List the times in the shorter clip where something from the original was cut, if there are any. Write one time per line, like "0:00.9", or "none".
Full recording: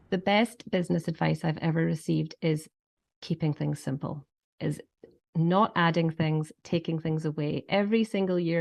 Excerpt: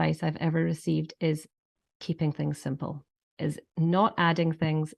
0:03.6